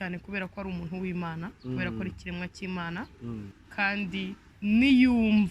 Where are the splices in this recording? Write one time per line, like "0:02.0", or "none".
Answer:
0:03.6
0:04.5